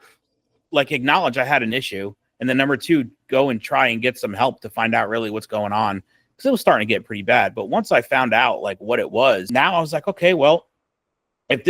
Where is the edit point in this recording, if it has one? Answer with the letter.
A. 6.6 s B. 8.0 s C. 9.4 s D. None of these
C